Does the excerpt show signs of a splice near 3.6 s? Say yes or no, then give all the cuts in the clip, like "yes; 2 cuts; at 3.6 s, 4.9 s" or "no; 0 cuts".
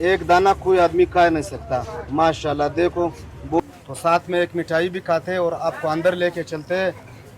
yes; 1 cut; at 3.6 s